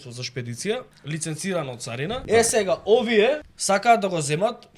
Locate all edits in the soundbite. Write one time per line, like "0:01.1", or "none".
0:01.0
0:02.2
0:03.5